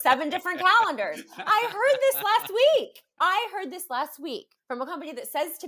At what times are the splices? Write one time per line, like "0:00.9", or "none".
0:03.0
0:04.5